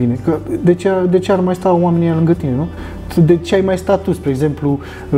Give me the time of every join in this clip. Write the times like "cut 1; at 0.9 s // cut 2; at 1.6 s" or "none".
none